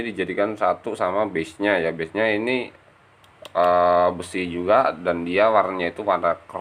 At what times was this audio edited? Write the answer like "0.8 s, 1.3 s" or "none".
none